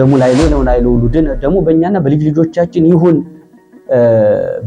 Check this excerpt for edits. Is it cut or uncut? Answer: uncut